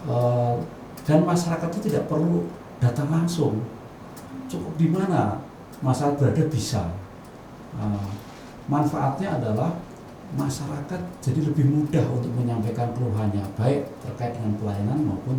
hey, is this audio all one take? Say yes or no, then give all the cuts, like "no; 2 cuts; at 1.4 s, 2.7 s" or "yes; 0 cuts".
yes; 0 cuts